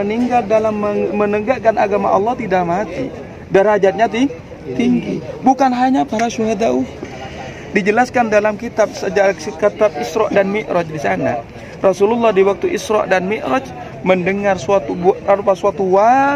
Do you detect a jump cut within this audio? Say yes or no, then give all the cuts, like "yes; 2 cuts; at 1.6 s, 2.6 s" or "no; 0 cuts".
no; 0 cuts